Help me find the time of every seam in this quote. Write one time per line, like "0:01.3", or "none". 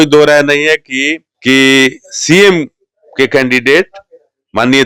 0:01.2